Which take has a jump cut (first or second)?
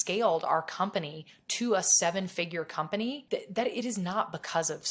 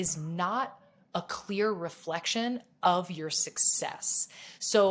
first